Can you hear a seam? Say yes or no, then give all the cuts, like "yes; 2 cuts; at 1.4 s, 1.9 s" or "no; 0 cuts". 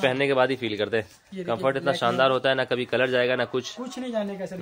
no; 0 cuts